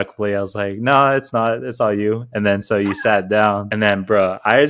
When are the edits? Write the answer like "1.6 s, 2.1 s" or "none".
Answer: 3.7 s